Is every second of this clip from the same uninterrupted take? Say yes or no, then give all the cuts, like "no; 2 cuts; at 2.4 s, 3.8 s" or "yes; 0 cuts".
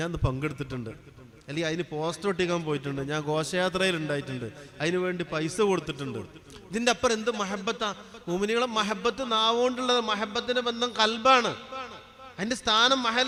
yes; 0 cuts